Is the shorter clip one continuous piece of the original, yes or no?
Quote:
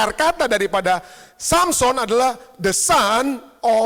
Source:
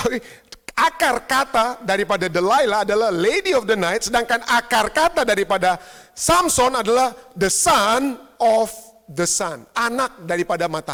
yes